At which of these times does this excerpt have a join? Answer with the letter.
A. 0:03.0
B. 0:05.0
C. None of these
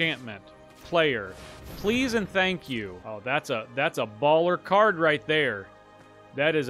A